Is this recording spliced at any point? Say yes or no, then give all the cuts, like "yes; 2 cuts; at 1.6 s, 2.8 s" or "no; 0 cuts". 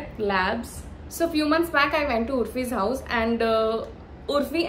yes; 1 cut; at 1.0 s